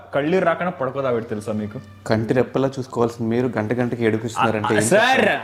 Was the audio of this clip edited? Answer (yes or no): no